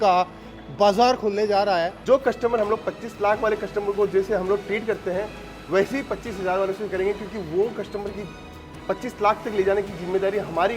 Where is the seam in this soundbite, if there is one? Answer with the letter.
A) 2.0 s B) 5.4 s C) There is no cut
A